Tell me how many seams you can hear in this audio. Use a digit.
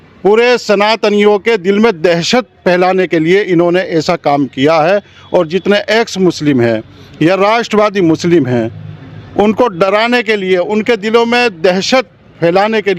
0